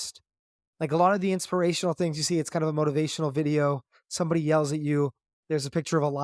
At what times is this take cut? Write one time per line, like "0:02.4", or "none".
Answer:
none